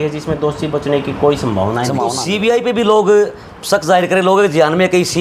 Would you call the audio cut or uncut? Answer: cut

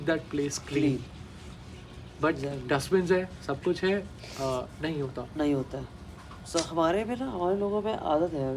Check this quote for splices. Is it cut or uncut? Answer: uncut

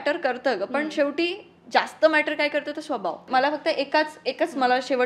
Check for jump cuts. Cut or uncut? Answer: cut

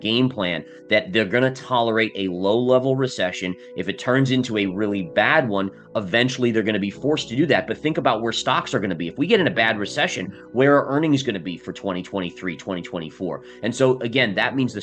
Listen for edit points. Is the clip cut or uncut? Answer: uncut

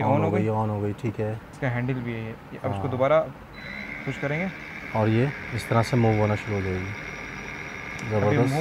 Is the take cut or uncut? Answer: uncut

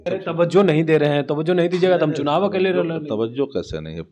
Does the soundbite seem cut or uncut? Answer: uncut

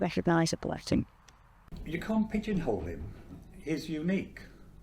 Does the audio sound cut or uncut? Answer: cut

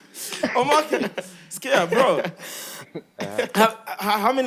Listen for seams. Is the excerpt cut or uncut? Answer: uncut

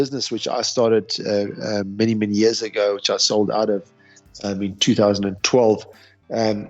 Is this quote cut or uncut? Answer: uncut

